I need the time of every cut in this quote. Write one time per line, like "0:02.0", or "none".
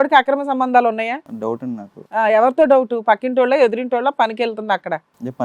0:01.7